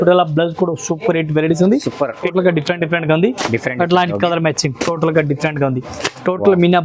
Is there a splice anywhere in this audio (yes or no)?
yes